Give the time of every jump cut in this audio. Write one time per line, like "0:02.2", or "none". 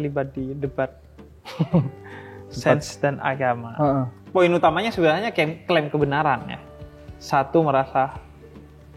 0:04.2